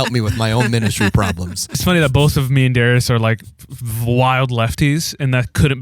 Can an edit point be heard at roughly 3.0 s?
no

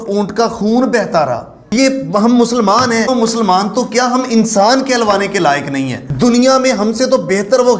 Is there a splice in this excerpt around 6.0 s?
yes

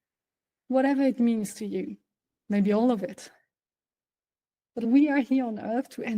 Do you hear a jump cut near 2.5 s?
no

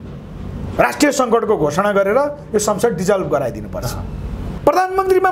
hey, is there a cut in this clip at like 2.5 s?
no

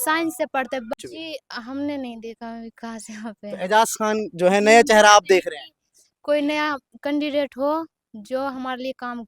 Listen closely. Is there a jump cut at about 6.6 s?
no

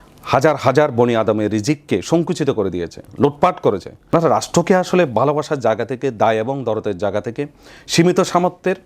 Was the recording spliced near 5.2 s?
no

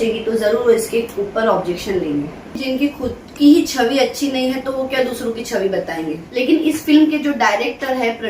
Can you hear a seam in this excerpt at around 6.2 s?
yes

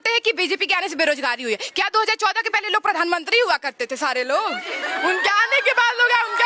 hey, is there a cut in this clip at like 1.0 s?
no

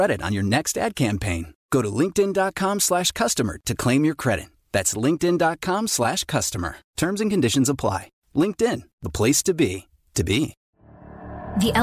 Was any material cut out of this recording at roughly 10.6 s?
yes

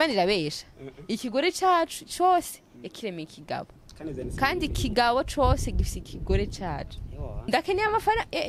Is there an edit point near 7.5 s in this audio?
yes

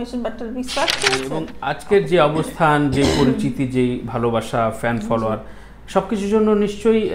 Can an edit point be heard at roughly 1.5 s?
yes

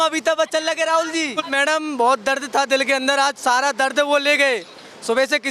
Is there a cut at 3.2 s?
no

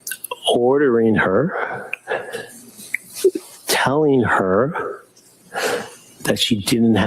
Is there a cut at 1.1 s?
no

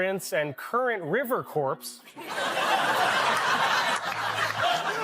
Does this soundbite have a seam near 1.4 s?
no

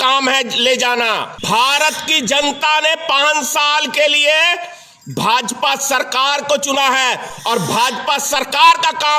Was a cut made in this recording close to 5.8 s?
no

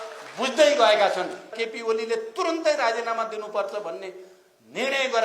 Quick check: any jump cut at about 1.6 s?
yes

